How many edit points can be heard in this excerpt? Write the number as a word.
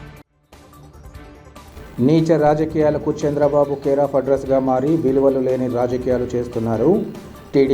one